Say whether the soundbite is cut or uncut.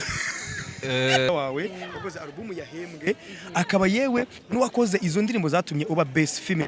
cut